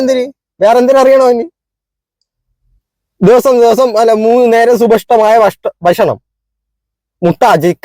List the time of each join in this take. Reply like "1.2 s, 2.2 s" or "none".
none